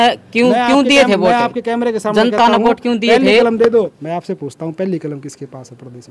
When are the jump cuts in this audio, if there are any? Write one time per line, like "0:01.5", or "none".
0:04.0

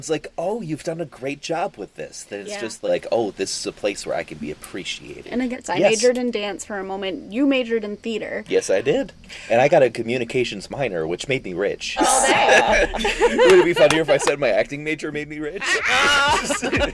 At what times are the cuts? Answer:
0:02.9
0:05.5
0:09.2
0:12.0

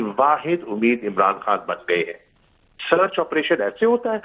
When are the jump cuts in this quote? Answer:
0:02.7

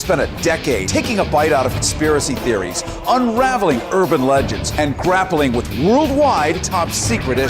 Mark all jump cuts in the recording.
0:01.3

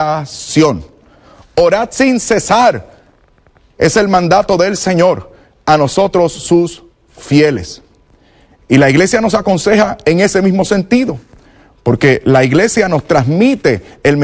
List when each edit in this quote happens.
0:12.0

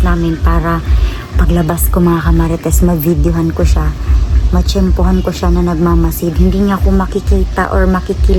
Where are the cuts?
none

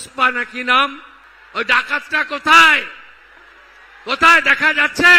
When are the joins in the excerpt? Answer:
none

